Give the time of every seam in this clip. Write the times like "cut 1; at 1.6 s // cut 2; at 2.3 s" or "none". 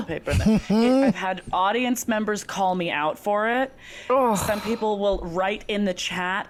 none